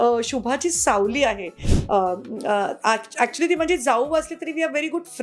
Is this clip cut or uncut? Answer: cut